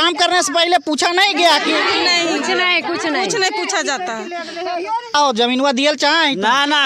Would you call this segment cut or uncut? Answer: cut